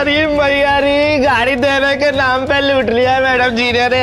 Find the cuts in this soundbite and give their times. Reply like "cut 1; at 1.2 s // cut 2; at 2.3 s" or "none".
none